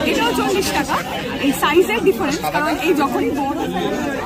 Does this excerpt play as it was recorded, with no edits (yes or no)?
yes